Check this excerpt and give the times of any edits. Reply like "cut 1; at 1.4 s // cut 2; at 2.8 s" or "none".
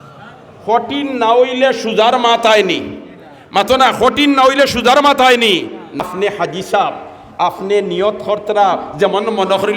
cut 1; at 6.0 s